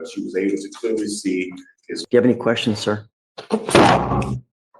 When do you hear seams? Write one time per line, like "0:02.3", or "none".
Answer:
0:01.9